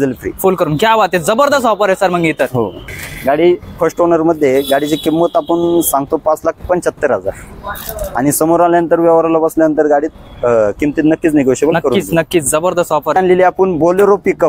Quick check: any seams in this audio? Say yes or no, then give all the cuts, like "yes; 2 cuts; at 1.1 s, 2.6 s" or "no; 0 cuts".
yes; 2 cuts; at 2.9 s, 13.2 s